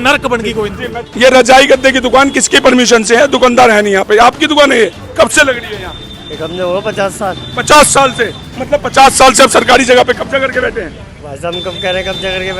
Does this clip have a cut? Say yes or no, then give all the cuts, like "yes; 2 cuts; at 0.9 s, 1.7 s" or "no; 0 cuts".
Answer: yes; 2 cuts; at 1.0 s, 5.0 s